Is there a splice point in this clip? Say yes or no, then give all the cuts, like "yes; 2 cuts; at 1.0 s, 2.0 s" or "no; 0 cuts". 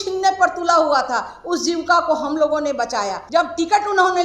yes; 1 cut; at 3.2 s